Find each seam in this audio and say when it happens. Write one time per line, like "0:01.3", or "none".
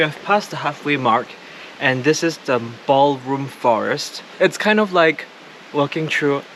none